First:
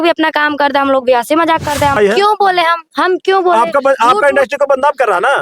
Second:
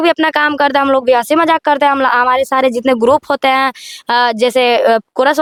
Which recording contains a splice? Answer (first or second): first